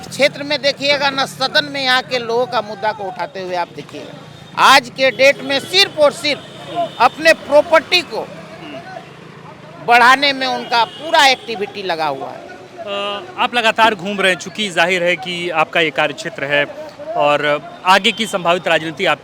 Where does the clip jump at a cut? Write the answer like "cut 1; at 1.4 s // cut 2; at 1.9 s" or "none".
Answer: none